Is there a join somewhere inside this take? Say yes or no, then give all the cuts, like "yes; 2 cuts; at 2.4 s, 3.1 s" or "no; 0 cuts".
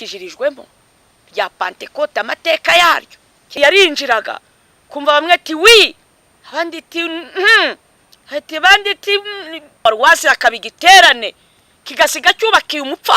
yes; 2 cuts; at 3.5 s, 9.8 s